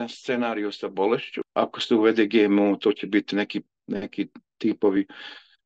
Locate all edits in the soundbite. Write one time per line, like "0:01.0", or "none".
0:01.4